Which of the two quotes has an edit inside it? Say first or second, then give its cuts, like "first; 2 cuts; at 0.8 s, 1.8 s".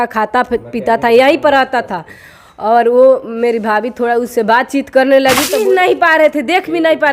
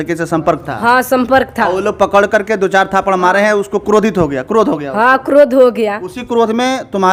first; 1 cut; at 5.6 s